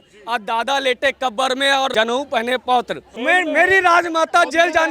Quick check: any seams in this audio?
yes; 2 cuts; at 1.9 s, 3.0 s

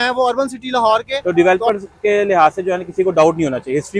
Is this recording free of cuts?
no; 1 cut; at 1.1 s

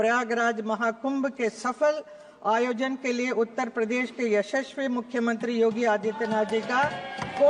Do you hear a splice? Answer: no; 0 cuts

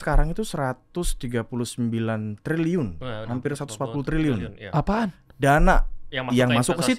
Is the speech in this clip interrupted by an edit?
no; 0 cuts

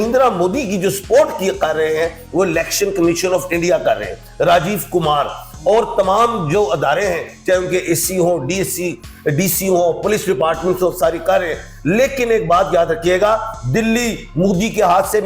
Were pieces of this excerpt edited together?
no; 0 cuts

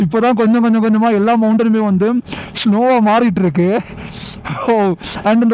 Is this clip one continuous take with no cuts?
yes; 0 cuts

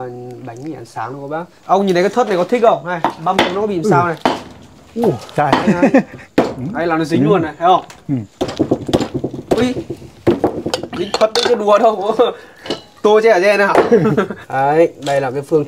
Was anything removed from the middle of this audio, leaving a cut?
yes; 3 cuts; at 1.5 s, 6.2 s, 14.3 s

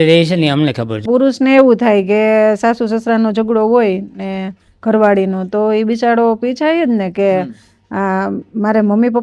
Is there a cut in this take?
yes; 1 cut; at 1.1 s

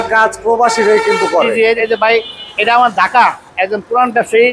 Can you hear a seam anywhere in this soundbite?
no; 0 cuts

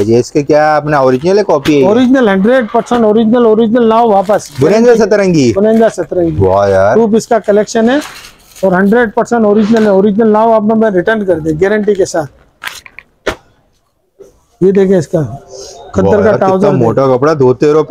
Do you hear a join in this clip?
no; 0 cuts

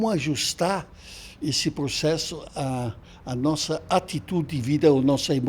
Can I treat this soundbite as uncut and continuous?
yes; 0 cuts

